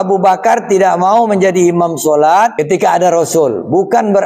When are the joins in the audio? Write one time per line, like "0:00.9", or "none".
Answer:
0:02.6